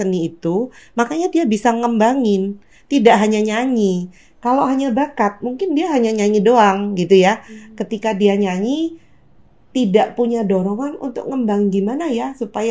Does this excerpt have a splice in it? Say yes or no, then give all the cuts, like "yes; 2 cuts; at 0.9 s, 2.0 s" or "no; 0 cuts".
no; 0 cuts